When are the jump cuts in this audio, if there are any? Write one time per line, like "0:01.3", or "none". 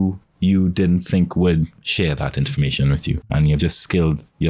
0:01.8
0:03.6